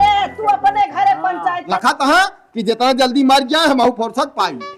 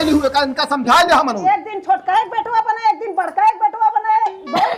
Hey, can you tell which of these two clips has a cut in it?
first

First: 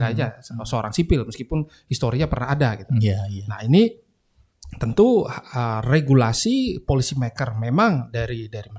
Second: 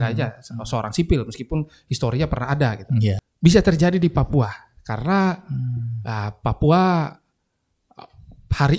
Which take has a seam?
second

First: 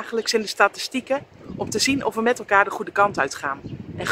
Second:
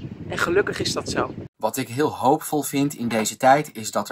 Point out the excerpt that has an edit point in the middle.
second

